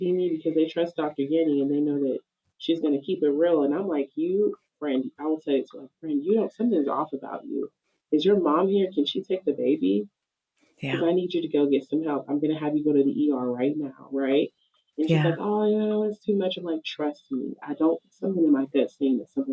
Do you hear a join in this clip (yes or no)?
no